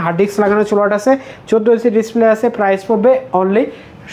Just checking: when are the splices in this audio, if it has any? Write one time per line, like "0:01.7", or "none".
none